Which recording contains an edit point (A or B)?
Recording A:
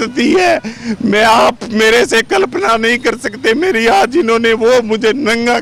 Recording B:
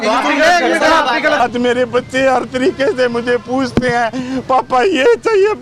B